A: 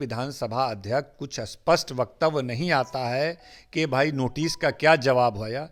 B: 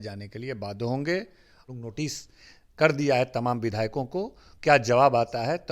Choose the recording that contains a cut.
B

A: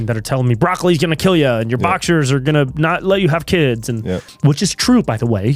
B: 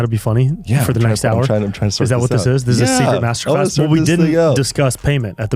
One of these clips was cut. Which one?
A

